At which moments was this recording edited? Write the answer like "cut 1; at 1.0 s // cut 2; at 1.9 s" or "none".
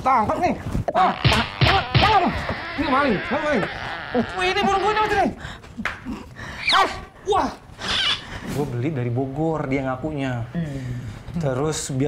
cut 1; at 8.5 s